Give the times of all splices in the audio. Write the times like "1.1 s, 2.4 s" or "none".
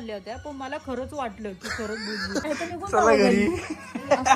2.4 s